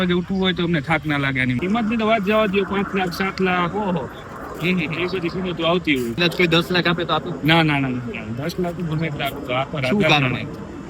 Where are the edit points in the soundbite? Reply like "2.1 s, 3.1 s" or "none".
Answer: 1.6 s, 6.2 s